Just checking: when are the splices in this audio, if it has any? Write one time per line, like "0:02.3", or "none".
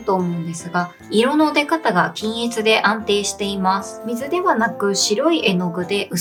none